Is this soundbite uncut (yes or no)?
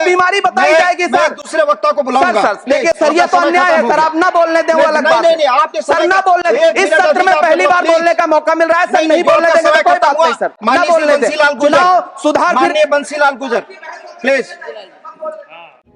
yes